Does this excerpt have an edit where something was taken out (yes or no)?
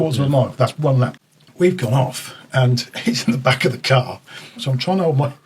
yes